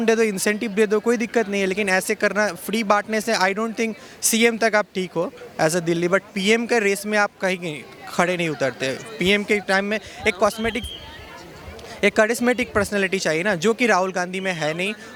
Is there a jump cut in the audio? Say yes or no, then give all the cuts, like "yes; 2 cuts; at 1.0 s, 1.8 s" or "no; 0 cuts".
no; 0 cuts